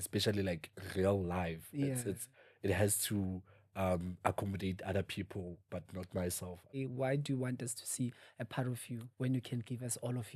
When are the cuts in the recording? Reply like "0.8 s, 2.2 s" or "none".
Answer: 6.8 s

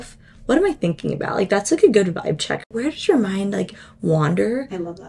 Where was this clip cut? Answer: none

